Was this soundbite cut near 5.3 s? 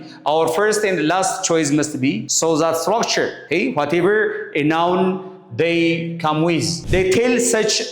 no; 3 cuts; at 2.3 s, 3.4 s, 6.8 s

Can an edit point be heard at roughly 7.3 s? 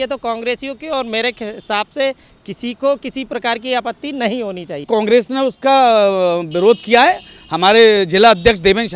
no; 1 cut; at 4.9 s

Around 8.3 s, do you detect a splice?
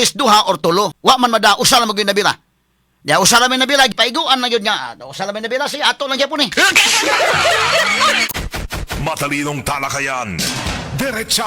yes; 3 cuts; at 0.9 s, 3.9 s, 8.3 s

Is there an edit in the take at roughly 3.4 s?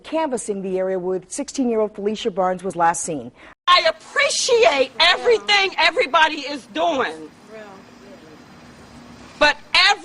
yes; 1 cut; at 3.4 s

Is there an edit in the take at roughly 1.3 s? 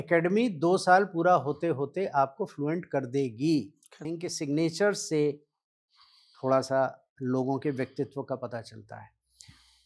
no; 1 cut; at 4.0 s

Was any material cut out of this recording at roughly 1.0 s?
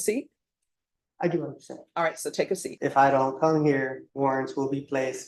no; 2 cuts; at 2.7 s, 4.0 s

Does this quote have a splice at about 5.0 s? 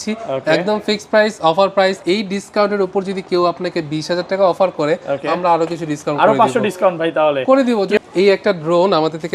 no; 2 cuts; at 2.0 s, 8.0 s

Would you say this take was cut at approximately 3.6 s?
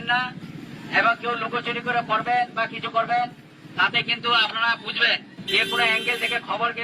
no; 1 cut; at 5.3 s

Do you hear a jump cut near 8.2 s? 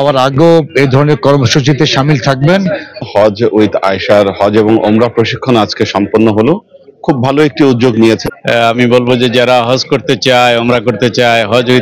yes; 2 cuts; at 3.0 s, 8.2 s

